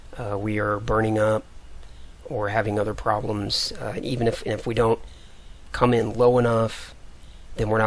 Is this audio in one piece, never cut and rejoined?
no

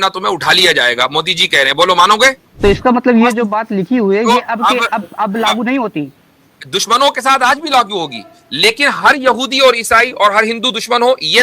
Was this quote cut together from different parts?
yes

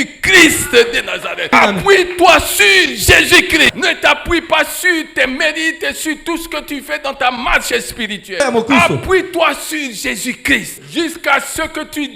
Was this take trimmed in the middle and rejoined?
yes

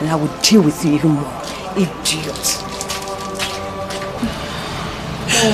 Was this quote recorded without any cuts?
no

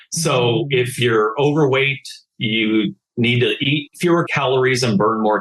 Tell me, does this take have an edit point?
yes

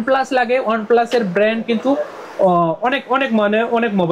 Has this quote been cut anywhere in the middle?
no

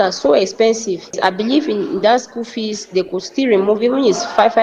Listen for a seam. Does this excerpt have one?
no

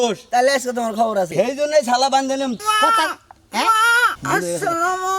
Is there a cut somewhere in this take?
yes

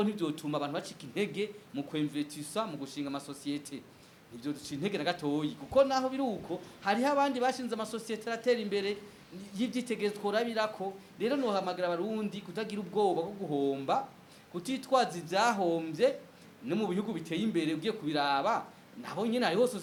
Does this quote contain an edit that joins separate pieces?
no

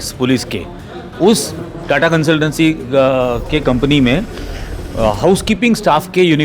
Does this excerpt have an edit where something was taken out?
no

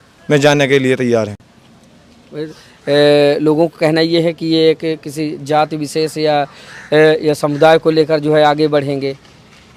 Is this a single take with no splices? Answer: yes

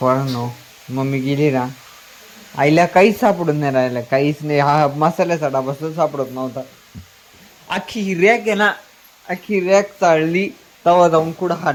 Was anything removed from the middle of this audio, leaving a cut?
no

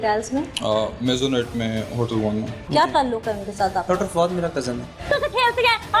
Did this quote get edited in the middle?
yes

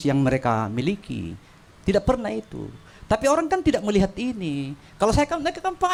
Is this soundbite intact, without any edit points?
yes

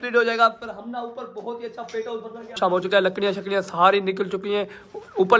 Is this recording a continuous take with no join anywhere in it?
no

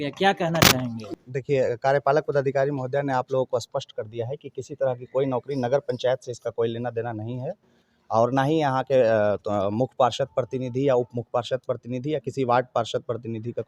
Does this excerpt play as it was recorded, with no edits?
no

